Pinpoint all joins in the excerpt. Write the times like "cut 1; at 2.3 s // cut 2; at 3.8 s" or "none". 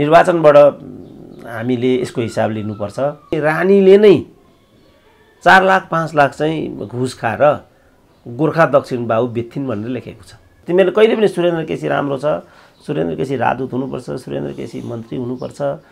cut 1; at 3.4 s // cut 2; at 10.6 s